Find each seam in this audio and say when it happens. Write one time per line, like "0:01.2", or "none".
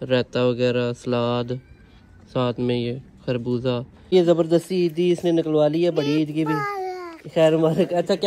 0:04.1

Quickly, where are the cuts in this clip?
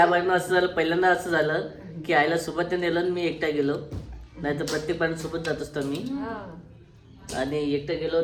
none

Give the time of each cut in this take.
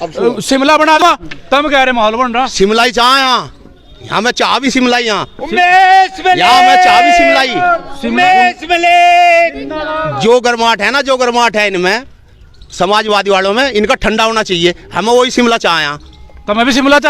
0:01.0

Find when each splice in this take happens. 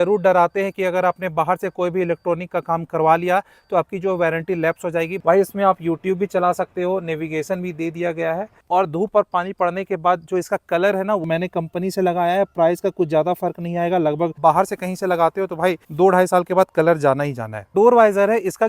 0:05.1
0:08.5
0:11.2
0:14.4
0:15.9
0:17.7

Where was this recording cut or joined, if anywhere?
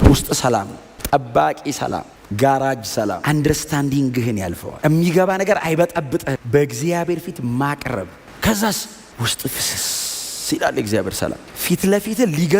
0:04.6
0:06.3

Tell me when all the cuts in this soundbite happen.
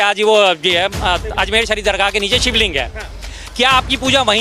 none

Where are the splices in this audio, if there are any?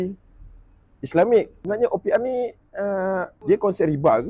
0:01.6
0:03.3

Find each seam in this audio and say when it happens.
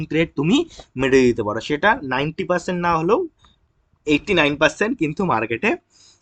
none

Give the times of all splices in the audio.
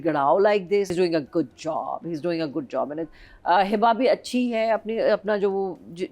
0:00.9

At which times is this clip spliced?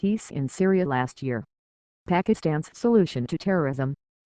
none

